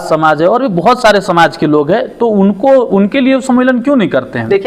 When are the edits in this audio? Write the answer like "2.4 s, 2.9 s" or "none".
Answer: none